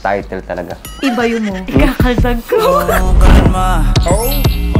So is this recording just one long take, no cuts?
yes; 0 cuts

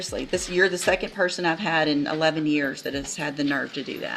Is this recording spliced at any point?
no; 0 cuts

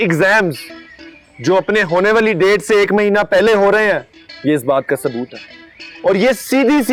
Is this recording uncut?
yes; 0 cuts

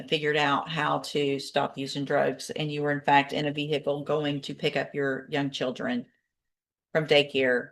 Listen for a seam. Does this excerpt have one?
no; 0 cuts

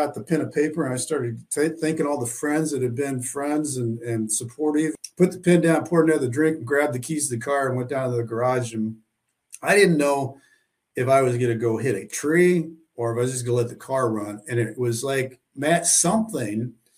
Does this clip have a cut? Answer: yes; 1 cut; at 4.9 s

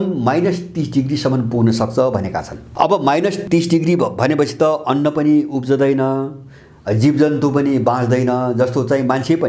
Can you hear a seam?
yes; 2 cuts; at 2.6 s, 3.4 s

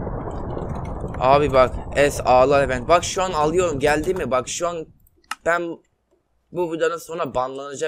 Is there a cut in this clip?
no; 0 cuts

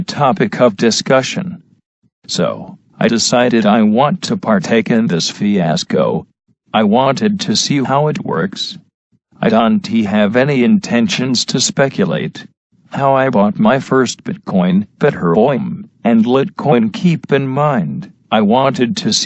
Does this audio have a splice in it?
no; 0 cuts

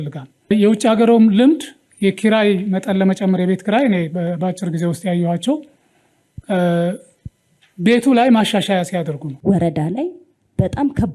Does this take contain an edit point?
yes; 1 cut; at 9.3 s

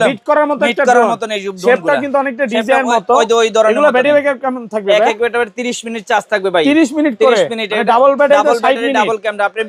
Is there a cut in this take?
no; 0 cuts

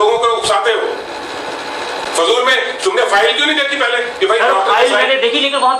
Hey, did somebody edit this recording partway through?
no; 0 cuts

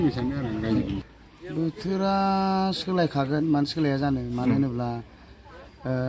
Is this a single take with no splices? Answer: no; 1 cut; at 0.9 s

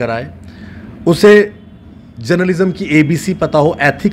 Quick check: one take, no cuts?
yes; 0 cuts

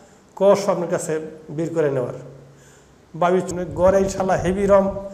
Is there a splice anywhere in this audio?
yes; 1 cut; at 3.5 s

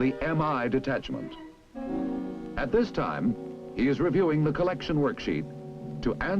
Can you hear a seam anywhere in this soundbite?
yes; 1 cut; at 2.9 s

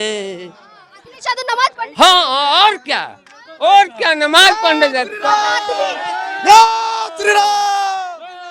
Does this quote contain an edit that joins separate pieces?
no; 0 cuts

